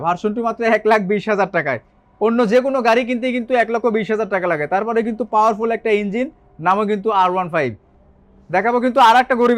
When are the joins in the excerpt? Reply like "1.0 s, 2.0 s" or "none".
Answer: none